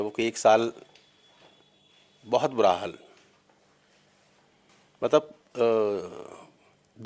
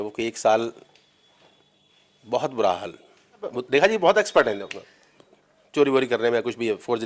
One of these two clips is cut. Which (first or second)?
second